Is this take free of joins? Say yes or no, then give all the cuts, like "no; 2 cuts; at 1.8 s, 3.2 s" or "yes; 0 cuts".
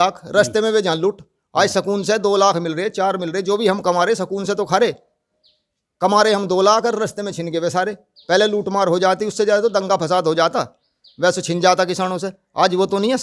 yes; 0 cuts